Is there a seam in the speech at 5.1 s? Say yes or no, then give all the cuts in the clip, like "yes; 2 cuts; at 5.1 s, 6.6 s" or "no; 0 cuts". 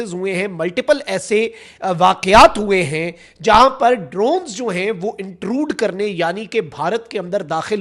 no; 0 cuts